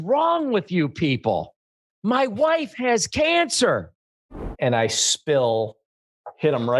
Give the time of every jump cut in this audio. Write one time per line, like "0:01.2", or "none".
0:04.5